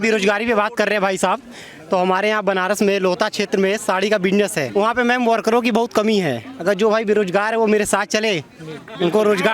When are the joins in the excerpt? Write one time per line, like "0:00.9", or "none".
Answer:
0:04.6